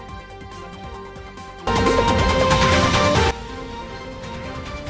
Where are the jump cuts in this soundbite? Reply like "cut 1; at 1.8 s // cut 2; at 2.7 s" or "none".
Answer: cut 1; at 1.7 s